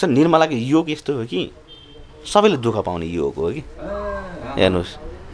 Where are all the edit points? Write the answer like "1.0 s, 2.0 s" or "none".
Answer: none